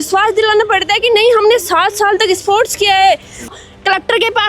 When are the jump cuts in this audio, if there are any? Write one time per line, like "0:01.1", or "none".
0:03.5